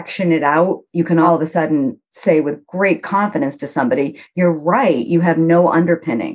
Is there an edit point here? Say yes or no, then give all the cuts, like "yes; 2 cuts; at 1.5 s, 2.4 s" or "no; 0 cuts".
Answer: yes; 1 cut; at 1.3 s